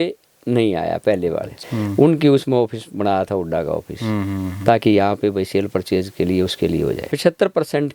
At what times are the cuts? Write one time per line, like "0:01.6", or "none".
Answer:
0:01.5
0:07.1